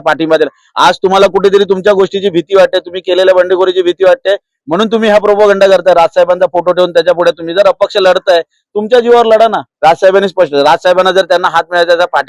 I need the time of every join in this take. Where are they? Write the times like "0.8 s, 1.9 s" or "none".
9.7 s